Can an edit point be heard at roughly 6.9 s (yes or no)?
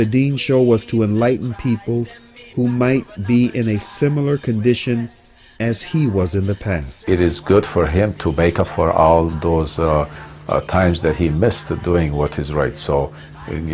yes